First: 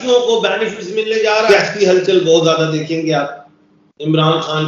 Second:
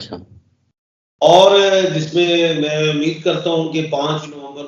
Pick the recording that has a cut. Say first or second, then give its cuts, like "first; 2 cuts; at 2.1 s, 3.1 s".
first; 1 cut; at 1.5 s